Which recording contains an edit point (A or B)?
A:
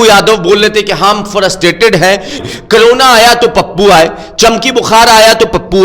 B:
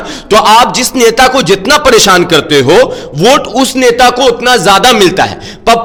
A